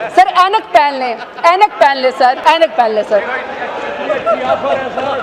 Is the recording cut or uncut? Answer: cut